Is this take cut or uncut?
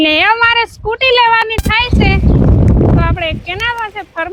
uncut